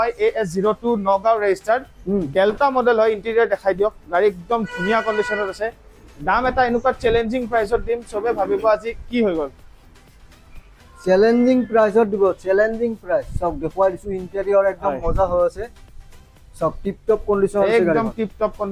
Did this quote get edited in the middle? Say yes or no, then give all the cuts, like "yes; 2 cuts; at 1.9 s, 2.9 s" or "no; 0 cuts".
no; 0 cuts